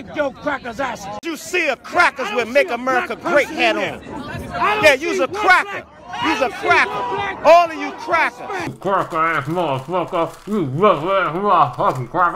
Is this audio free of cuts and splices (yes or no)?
no